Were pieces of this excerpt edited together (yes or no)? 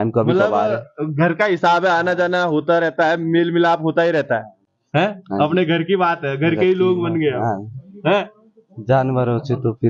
no